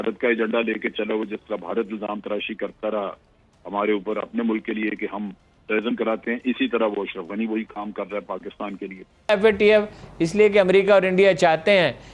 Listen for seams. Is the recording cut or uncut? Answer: cut